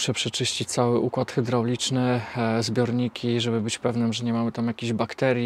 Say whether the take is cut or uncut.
uncut